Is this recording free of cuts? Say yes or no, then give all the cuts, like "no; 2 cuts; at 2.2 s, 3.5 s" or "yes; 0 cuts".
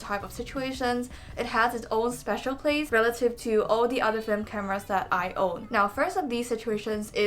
yes; 0 cuts